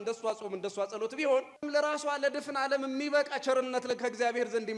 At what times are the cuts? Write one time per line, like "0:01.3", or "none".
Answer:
0:01.6